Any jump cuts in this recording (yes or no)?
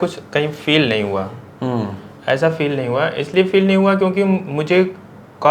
no